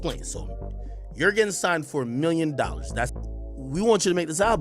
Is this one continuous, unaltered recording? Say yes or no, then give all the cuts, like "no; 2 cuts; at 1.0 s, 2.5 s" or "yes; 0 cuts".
no; 1 cut; at 3.2 s